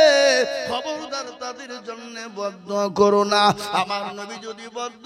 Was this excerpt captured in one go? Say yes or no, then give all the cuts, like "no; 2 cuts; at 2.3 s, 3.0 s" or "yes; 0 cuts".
yes; 0 cuts